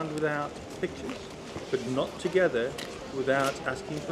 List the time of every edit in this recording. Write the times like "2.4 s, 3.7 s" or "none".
none